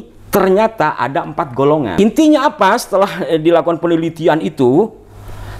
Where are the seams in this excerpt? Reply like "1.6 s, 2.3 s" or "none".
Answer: 2.0 s